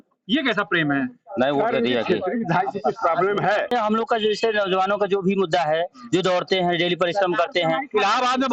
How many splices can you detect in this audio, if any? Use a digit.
1